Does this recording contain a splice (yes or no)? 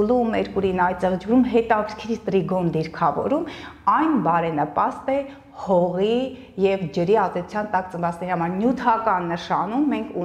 no